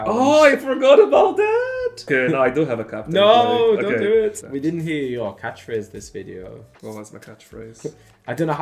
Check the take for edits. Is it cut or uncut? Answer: cut